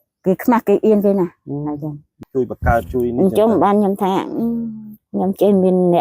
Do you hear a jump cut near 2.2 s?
yes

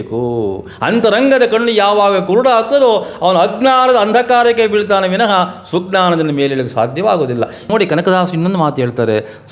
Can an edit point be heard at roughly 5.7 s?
no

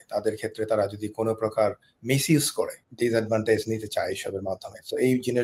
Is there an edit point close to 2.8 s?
yes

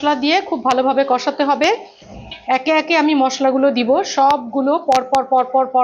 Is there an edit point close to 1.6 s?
no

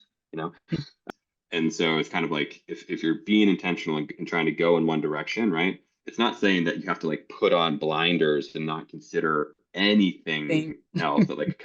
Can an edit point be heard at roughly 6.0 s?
no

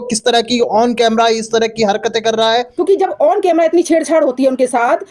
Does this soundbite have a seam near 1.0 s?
no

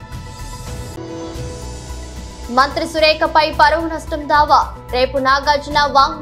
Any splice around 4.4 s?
no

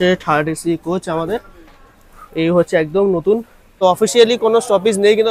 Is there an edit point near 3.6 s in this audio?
yes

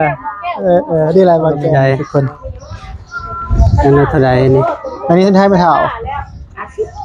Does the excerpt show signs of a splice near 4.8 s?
no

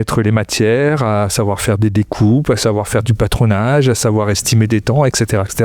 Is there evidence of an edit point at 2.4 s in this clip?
no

